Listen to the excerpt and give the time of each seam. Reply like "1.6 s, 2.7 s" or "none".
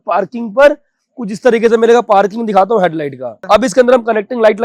3.3 s